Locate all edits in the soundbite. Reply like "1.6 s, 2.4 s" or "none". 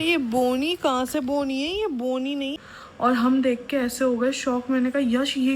2.6 s